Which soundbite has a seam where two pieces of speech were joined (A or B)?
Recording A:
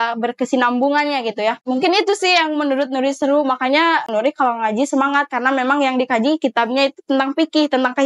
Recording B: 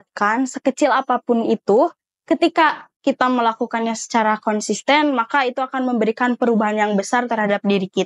A